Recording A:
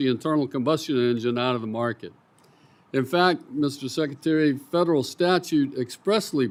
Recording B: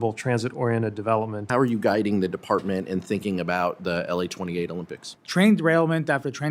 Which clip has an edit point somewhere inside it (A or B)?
B